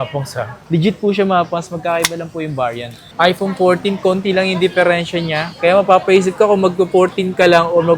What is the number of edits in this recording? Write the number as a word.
two